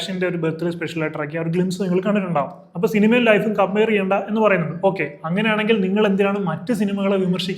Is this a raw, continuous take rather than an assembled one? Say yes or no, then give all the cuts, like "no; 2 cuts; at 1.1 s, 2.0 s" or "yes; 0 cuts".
no; 1 cut; at 2.6 s